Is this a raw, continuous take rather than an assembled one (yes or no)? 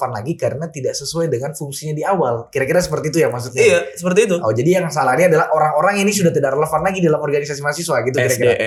yes